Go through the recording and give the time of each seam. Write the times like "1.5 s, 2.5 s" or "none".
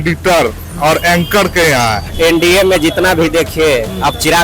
2.0 s